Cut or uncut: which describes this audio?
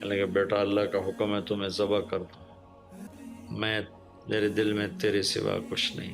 cut